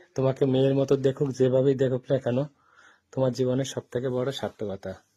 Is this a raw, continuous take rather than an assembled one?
yes; 0 cuts

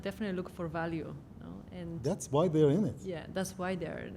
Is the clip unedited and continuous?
yes; 0 cuts

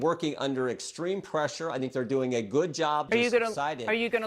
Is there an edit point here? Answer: yes; 1 cut; at 3.1 s

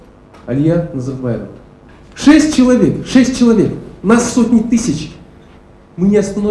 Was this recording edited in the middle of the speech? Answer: no; 0 cuts

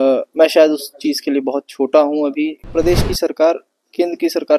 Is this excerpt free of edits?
no; 1 cut; at 2.6 s

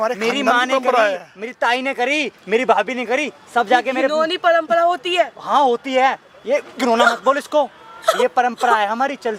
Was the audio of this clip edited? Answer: no; 0 cuts

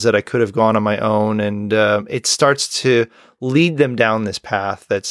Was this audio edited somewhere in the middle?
no; 0 cuts

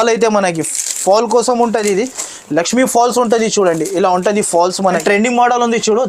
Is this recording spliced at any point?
yes; 1 cut; at 5.0 s

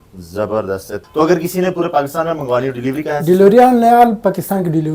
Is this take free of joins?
no; 1 cut; at 1.0 s

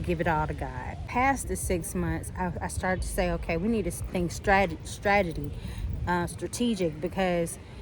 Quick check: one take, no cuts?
no; 1 cut; at 1.0 s

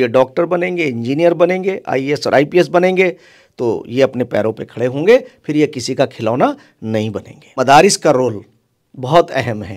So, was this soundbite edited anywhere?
yes; 1 cut; at 7.6 s

